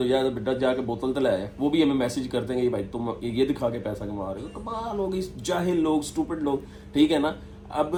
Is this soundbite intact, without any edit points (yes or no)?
yes